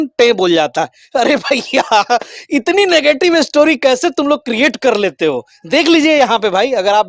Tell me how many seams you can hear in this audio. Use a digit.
0